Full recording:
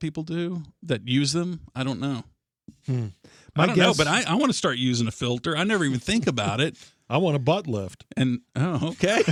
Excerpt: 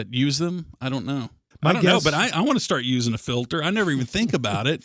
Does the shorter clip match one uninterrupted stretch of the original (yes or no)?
no